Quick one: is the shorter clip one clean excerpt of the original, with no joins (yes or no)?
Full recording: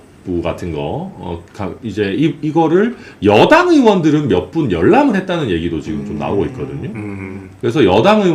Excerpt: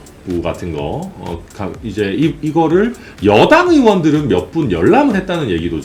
yes